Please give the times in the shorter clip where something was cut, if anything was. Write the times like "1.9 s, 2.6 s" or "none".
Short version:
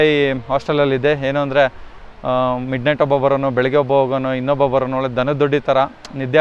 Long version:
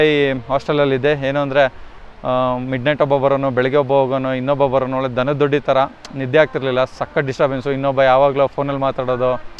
none

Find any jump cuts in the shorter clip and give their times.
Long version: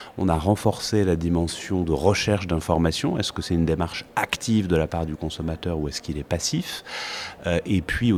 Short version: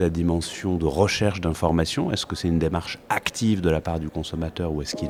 none

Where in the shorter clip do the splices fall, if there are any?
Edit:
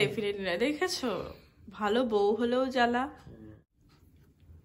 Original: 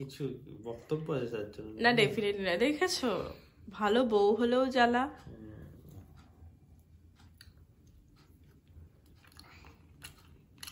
3.6 s

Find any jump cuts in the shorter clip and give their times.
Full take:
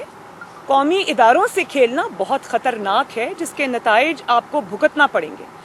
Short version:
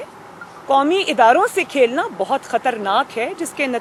none

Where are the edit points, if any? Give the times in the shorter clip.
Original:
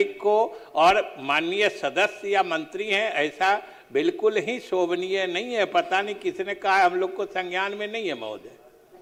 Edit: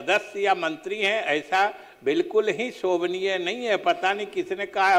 none

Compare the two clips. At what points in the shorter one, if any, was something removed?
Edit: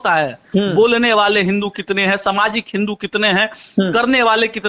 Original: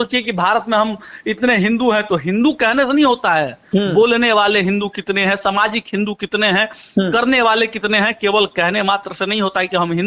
none

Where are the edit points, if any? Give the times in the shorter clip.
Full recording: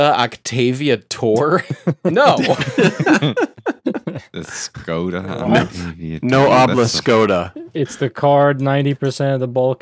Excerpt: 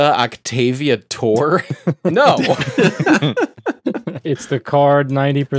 4.1 s

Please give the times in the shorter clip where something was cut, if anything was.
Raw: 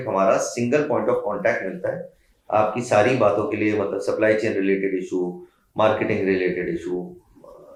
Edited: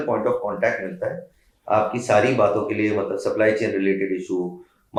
none

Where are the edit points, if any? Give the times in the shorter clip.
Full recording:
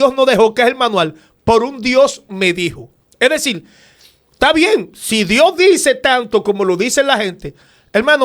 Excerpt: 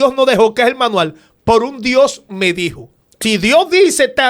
3.1 s

